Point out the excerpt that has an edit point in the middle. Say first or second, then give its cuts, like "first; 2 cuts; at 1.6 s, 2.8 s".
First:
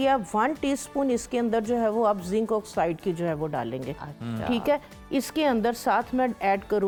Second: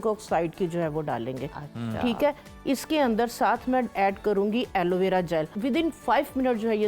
second; 1 cut; at 5.5 s